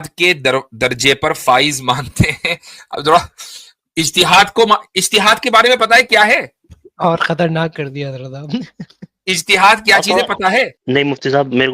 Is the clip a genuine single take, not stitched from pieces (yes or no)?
no